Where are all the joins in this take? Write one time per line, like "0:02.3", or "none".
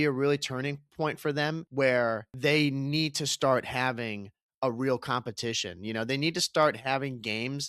0:01.6
0:02.3